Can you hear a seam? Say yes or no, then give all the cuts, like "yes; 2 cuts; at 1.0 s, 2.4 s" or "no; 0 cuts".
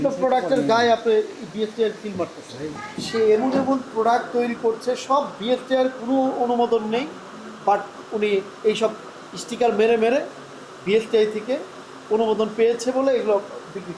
no; 0 cuts